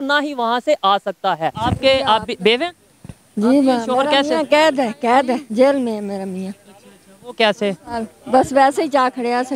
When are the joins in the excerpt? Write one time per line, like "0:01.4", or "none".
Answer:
0:01.6